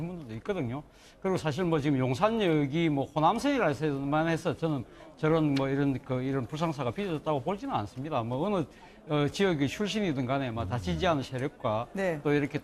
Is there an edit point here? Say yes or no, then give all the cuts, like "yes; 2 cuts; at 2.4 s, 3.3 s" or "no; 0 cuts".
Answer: yes; 1 cut; at 4.3 s